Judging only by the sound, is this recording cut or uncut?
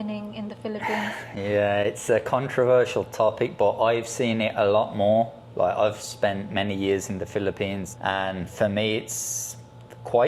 uncut